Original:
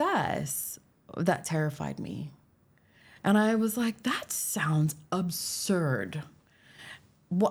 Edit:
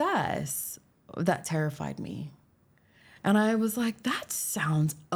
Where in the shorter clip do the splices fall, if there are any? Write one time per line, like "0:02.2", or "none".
none